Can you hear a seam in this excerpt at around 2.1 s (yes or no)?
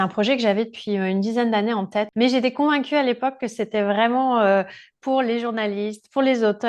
yes